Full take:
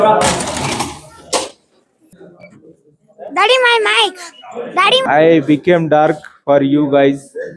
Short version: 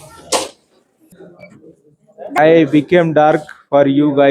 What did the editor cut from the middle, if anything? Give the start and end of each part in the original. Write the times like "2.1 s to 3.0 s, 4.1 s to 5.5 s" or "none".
3.4 s to 5.1 s